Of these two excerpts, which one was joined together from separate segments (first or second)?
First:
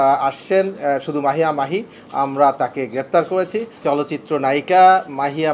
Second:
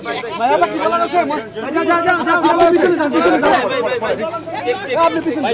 first